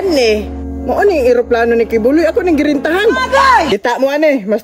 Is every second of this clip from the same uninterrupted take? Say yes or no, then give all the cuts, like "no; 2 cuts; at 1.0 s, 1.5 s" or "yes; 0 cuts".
no; 1 cut; at 3.7 s